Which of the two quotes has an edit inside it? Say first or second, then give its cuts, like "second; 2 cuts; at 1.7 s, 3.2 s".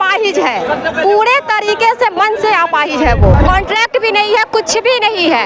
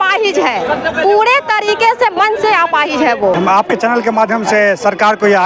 first; 1 cut; at 3.3 s